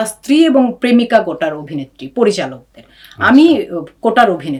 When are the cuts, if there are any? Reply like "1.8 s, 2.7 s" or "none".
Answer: none

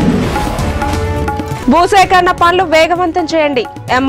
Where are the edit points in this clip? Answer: 1.6 s

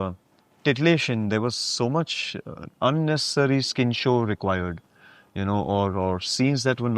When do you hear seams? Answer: none

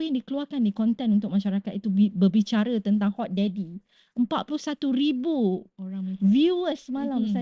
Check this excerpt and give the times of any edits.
none

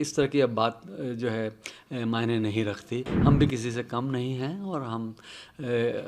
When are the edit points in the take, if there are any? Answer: 3.1 s

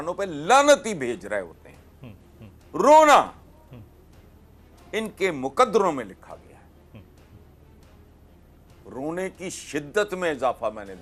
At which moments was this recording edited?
none

